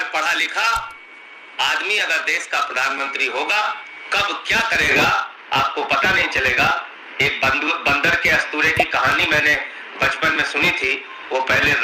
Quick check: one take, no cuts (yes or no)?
yes